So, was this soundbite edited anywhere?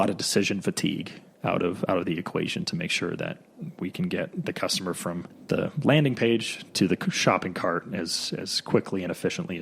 yes; 1 cut; at 5.3 s

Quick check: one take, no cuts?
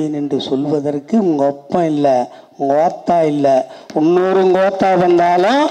yes; 0 cuts

